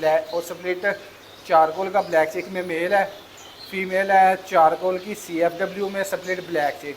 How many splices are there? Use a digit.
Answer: 0